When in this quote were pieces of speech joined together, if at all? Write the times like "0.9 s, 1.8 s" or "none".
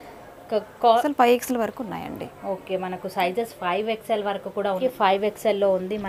1.0 s, 4.8 s

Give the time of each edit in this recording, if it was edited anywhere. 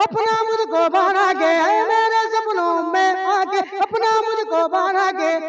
none

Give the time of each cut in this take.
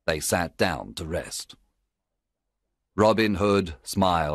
none

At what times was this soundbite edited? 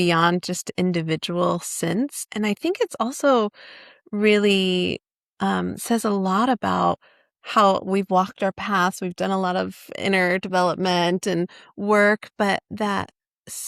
2.2 s

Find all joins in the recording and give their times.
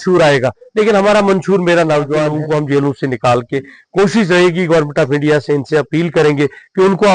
2.3 s

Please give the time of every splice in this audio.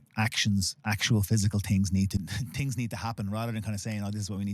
2.2 s

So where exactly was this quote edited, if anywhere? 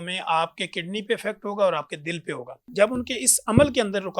2.5 s

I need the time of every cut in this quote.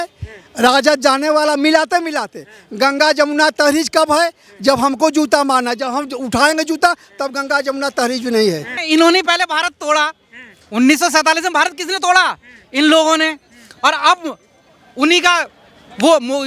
8.7 s

